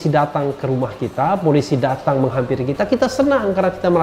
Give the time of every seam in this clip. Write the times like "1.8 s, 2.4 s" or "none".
none